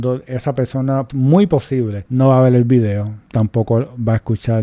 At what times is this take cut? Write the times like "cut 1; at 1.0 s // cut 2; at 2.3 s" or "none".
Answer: cut 1; at 1.1 s // cut 2; at 2.0 s // cut 3; at 3.1 s